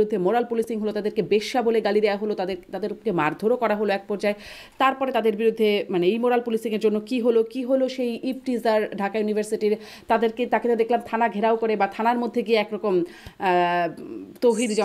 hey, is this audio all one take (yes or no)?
yes